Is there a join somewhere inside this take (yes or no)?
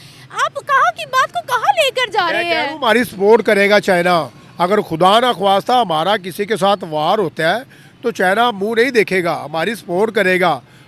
no